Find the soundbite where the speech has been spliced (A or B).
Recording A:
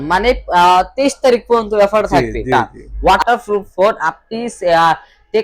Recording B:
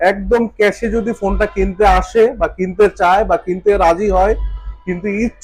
A